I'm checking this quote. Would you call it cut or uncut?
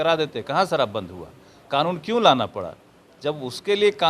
uncut